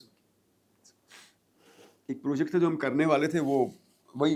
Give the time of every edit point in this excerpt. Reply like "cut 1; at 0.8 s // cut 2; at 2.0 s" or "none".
none